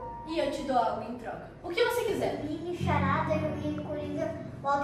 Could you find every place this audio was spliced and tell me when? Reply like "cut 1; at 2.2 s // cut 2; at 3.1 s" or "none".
cut 1; at 2.4 s